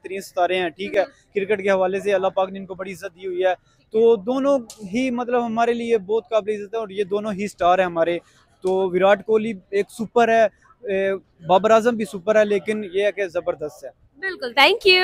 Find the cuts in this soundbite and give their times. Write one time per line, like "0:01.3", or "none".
none